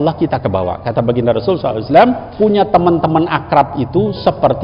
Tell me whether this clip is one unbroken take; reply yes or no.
no